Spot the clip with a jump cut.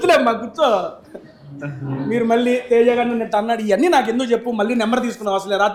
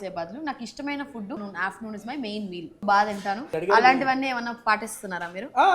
second; 3 cuts; at 1.4 s, 2.7 s, 3.5 s

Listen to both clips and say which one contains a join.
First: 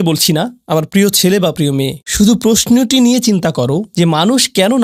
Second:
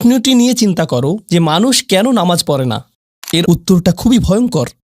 second; 1 cut; at 3.4 s

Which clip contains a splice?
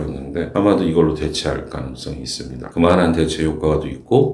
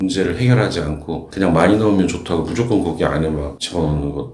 second; 1 cut; at 1.3 s

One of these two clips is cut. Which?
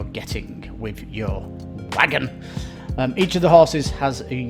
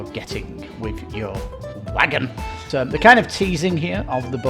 second; 1 cut; at 2.6 s

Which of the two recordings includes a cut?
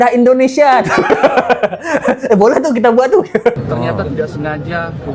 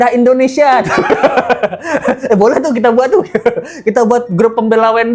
first; 1 cut; at 3.6 s

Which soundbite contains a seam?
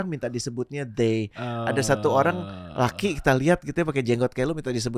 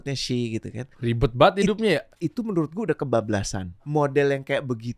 second; 3 cuts; at 0.9 s, 2.2 s, 3.7 s

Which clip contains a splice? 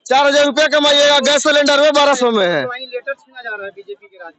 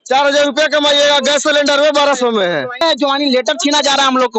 second; 1 cut; at 2.8 s

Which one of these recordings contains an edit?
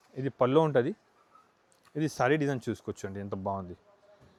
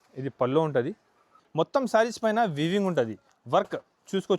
second; 1 cut; at 1.4 s

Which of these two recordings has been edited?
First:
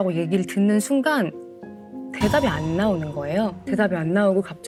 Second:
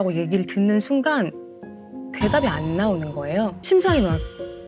second; 1 cut; at 3.6 s

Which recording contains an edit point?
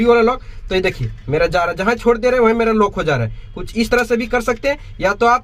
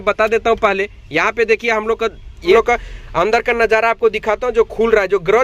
second; 1 cut; at 2.5 s

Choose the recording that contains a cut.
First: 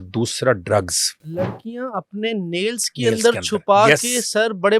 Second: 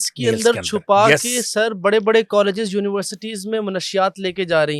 first; 1 cut; at 1.2 s

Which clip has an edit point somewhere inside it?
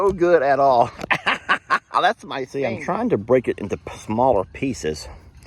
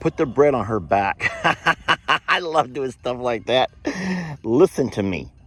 first; 1 cut; at 2.5 s

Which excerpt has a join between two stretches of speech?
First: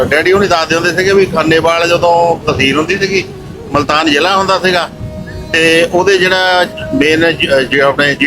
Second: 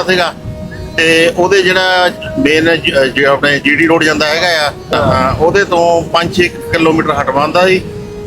second; 1 cut; at 4.9 s

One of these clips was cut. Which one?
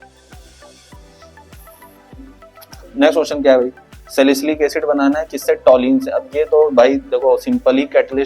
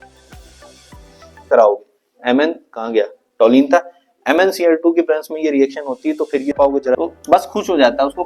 second; 2 cuts; at 1.5 s, 6.6 s

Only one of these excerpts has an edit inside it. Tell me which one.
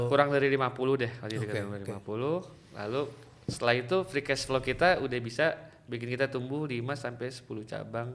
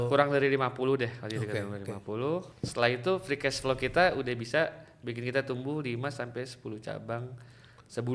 second; 1 cut; at 2.6 s

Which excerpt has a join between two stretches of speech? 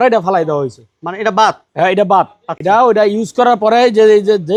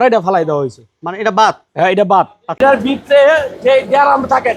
second; 1 cut; at 2.6 s

